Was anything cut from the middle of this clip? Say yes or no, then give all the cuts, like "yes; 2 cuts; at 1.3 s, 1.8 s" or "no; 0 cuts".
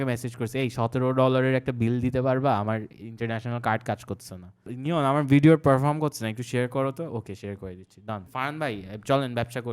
yes; 2 cuts; at 4.6 s, 8.3 s